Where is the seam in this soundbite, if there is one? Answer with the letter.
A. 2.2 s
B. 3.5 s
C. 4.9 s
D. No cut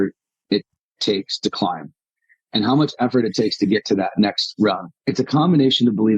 C